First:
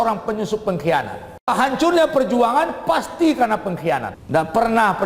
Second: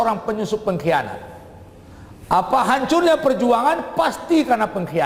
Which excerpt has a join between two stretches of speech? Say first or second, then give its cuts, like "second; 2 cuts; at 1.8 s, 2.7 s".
first; 2 cuts; at 1.5 s, 4.2 s